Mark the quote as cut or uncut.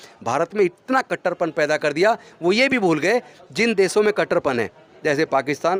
uncut